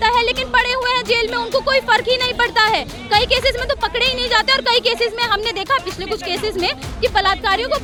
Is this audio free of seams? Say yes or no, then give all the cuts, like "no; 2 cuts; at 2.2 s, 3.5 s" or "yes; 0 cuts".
yes; 0 cuts